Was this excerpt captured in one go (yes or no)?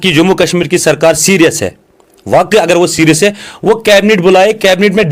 yes